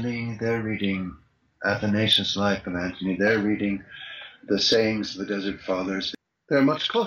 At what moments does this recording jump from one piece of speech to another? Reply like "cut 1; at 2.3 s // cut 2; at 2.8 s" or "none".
cut 1; at 6.1 s